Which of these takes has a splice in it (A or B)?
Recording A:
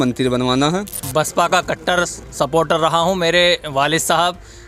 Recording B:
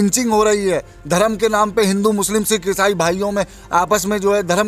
A